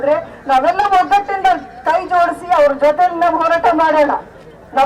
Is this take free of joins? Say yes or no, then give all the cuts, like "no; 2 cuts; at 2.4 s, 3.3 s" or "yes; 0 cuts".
yes; 0 cuts